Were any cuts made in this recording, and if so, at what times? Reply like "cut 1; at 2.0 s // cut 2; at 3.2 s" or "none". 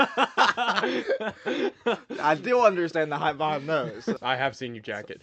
cut 1; at 4.2 s